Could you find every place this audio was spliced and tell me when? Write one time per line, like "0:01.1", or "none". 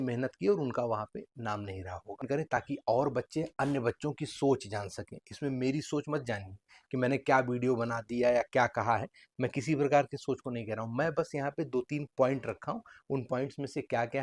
0:02.2